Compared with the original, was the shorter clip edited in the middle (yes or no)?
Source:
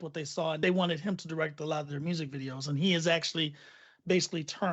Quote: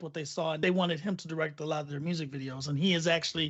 no